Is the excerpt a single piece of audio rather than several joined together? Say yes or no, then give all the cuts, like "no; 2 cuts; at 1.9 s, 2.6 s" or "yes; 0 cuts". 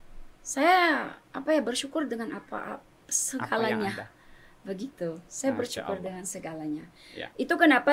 yes; 0 cuts